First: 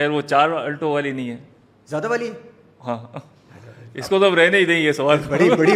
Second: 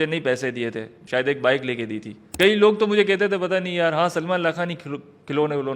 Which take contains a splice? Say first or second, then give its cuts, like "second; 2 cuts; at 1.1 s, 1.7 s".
second; 2 cuts; at 0.9 s, 2.3 s